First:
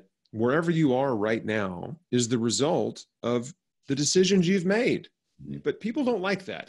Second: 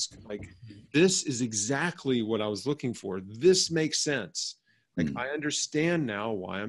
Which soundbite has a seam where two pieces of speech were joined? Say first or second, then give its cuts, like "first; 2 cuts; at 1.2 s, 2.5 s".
first; 1 cut; at 5.6 s